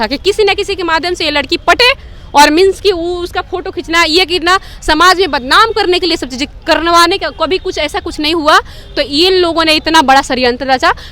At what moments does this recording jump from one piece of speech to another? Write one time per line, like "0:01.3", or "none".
none